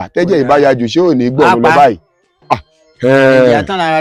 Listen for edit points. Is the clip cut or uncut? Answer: uncut